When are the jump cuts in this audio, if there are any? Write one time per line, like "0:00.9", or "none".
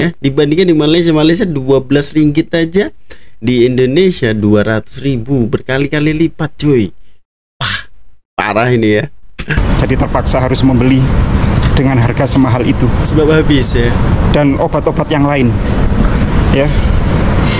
none